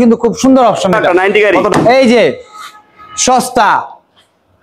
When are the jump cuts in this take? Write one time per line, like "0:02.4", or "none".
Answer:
0:01.0